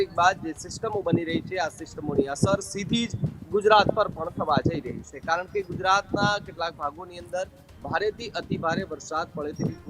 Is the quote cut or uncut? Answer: uncut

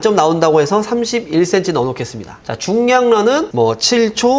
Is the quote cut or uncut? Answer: uncut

